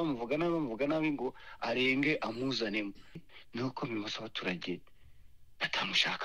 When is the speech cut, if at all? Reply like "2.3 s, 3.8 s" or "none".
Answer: 3.2 s